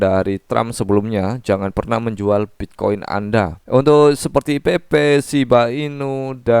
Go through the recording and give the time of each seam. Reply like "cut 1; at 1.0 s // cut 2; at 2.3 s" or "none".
cut 1; at 3.6 s